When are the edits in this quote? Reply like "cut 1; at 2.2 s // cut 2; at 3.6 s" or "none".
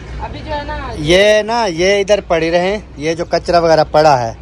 none